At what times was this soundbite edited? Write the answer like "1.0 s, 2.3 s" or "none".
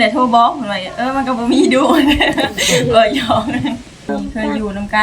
4.1 s